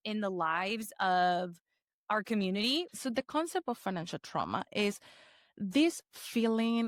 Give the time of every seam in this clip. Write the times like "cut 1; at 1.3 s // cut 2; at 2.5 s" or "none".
cut 1; at 2.9 s